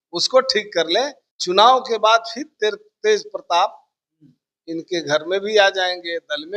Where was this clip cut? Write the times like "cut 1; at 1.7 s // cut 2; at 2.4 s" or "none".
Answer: cut 1; at 1.3 s